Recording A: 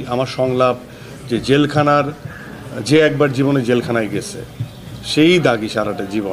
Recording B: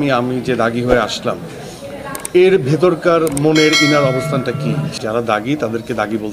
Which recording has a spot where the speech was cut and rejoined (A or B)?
B